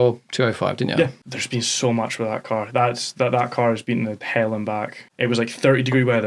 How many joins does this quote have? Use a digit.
2